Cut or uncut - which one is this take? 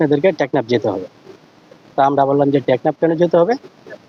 uncut